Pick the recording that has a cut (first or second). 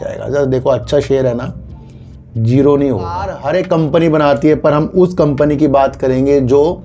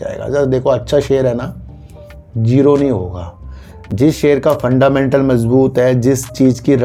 first